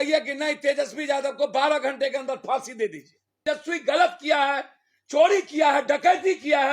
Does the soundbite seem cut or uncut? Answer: cut